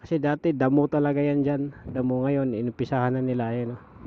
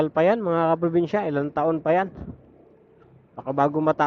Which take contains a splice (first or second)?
first